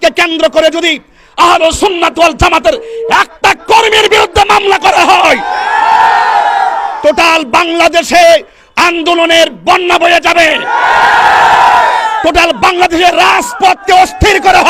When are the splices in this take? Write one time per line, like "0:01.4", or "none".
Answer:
none